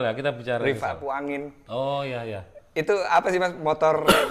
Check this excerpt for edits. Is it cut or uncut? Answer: cut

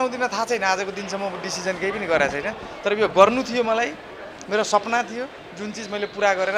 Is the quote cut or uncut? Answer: uncut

